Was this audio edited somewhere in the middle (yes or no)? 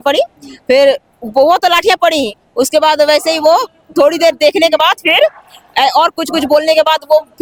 no